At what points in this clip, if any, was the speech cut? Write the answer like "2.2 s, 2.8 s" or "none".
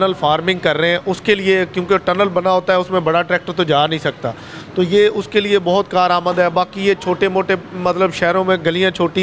none